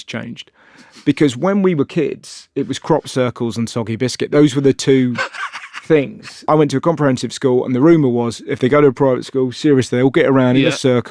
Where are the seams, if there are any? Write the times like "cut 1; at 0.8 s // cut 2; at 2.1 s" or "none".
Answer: cut 1; at 6.4 s